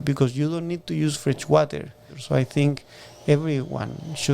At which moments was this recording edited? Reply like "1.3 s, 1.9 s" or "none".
2.2 s

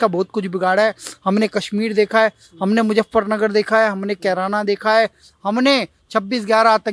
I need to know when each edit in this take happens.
none

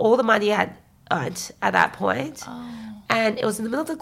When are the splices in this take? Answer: none

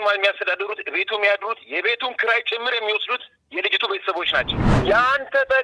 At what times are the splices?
4.6 s

